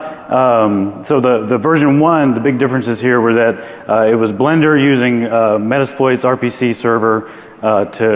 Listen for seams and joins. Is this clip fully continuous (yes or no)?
yes